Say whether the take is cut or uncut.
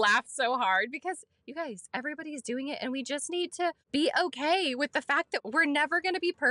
cut